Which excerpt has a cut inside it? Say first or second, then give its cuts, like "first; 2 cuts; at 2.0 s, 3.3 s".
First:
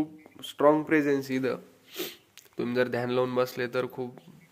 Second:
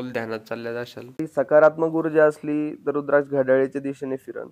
second; 1 cut; at 1.2 s